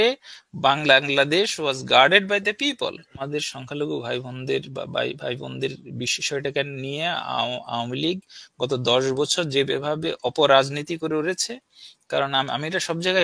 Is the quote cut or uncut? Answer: cut